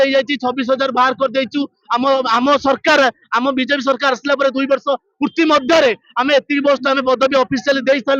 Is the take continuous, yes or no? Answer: yes